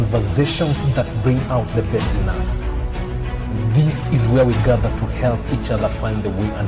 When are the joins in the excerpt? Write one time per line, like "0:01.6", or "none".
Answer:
none